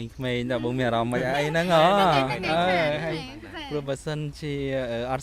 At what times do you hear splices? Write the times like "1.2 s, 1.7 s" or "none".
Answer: none